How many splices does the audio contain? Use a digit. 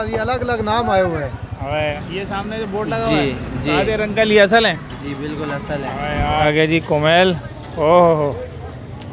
2